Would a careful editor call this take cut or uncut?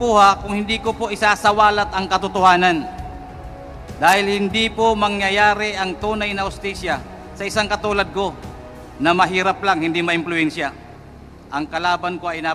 uncut